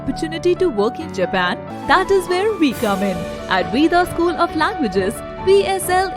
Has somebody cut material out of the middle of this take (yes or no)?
yes